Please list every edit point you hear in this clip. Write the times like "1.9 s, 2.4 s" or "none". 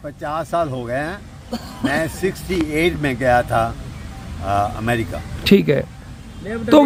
none

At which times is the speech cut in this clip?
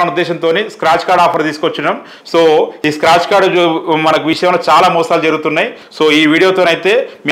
none

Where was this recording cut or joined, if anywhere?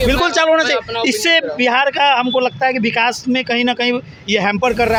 none

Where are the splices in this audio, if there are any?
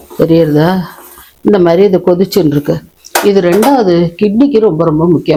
none

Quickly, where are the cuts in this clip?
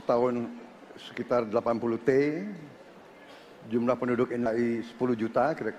4.5 s

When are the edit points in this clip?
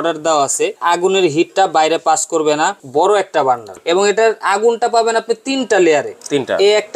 0.8 s, 2.8 s, 3.7 s

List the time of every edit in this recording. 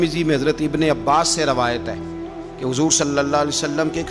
none

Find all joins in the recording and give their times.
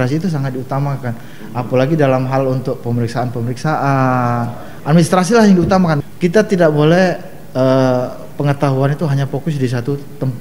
6.0 s

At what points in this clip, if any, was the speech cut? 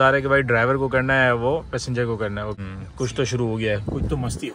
2.6 s

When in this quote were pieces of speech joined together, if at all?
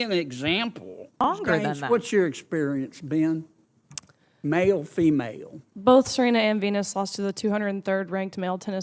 1.2 s

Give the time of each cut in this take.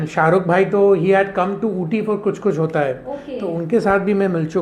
2.8 s

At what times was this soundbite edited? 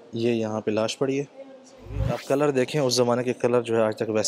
2.2 s

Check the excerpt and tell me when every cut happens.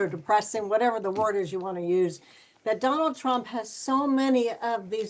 none

